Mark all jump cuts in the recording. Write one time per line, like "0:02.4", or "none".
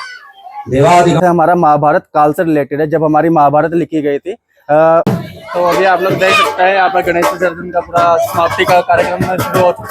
0:01.2
0:05.0